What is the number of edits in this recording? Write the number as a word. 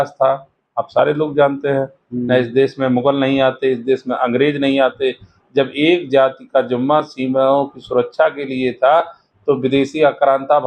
zero